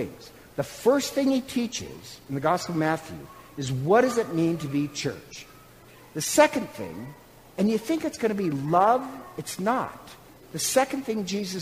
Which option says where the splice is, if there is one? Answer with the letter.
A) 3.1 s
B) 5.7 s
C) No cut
B